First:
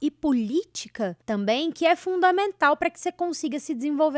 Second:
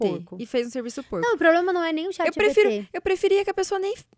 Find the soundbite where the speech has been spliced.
first; 1 cut; at 1.2 s

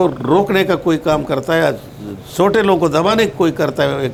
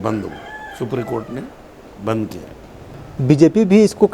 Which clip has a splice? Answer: second; 1 cut; at 2.9 s

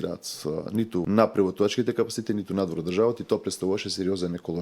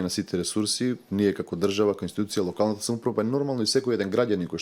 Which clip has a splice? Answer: first; 1 cut; at 1.0 s

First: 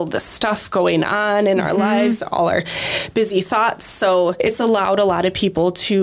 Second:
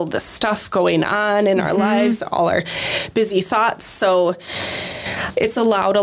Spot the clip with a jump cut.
first; 1 cut; at 4.3 s

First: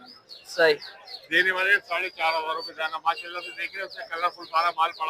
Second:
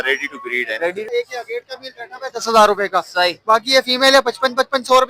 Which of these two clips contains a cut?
second; 1 cut; at 1.1 s

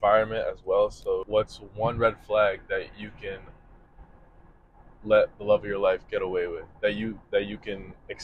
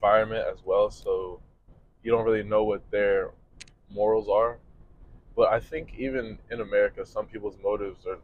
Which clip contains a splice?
first; 1 cut; at 1.2 s

